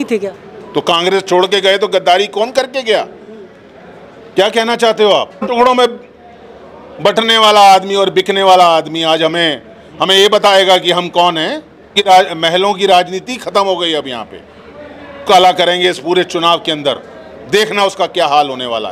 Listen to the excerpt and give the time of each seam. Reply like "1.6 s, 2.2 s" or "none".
5.5 s, 12.0 s, 15.2 s